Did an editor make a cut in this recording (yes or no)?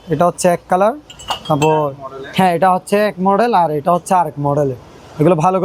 no